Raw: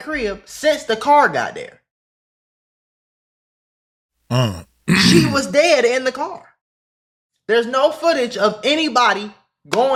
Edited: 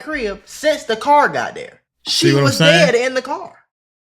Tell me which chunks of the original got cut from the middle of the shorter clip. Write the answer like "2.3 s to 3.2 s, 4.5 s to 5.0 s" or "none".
2.2 s to 5.1 s